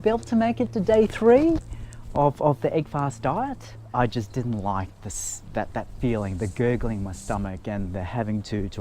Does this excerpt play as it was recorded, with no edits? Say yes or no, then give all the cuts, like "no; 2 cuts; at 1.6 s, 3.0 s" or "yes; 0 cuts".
no; 1 cut; at 3.8 s